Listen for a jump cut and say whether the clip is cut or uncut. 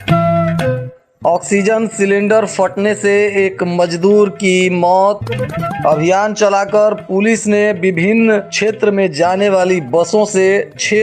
cut